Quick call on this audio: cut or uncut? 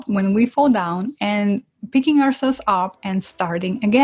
uncut